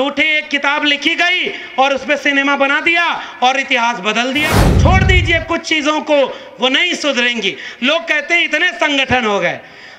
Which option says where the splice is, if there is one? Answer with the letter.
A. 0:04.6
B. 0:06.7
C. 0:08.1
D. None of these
A